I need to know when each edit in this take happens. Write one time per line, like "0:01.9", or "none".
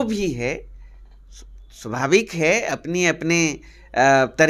none